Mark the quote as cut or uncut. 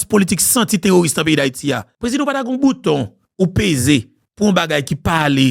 cut